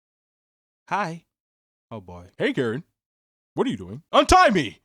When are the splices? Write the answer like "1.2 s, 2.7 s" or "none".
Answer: 2.2 s, 3.9 s